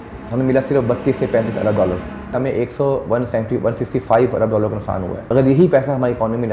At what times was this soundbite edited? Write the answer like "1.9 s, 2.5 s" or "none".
2.3 s, 5.2 s